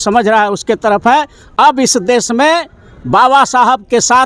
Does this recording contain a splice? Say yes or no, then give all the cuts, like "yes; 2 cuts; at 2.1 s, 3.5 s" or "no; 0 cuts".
no; 0 cuts